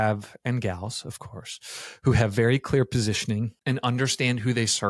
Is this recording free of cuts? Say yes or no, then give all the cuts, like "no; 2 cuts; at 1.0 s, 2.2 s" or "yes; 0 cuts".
no; 1 cut; at 3.5 s